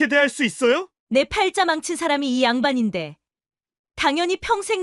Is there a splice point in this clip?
yes; 1 cut; at 0.9 s

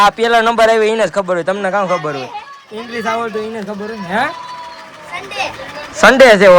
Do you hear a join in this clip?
no; 0 cuts

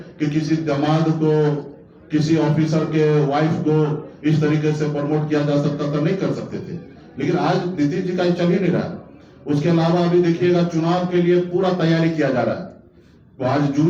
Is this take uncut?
yes; 0 cuts

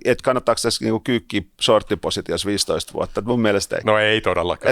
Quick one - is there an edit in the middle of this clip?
yes; 1 cut; at 3.7 s

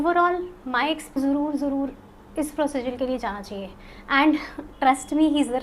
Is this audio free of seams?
no; 1 cut; at 1.1 s

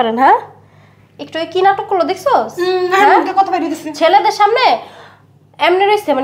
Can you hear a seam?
no; 0 cuts

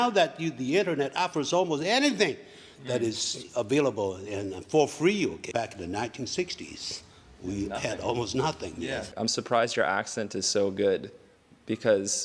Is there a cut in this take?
yes; 2 cuts; at 5.4 s, 9.1 s

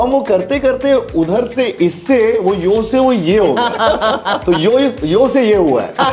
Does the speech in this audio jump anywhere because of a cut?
no; 0 cuts

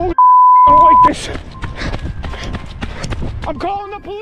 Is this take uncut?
no; 1 cut; at 1.1 s

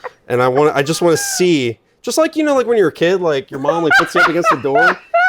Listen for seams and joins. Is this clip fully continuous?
yes; 0 cuts

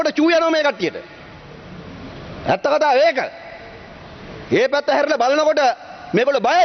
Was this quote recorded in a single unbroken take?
yes; 0 cuts

